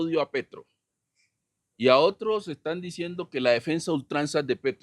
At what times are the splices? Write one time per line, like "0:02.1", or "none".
none